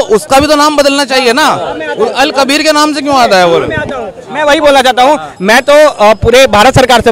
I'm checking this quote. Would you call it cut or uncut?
uncut